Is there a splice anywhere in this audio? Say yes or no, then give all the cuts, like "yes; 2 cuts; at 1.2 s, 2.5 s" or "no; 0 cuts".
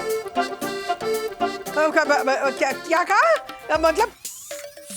yes; 1 cut; at 1.7 s